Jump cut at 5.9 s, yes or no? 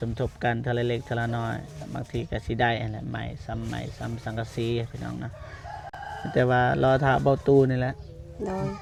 no